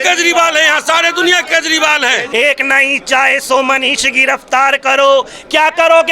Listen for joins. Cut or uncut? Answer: cut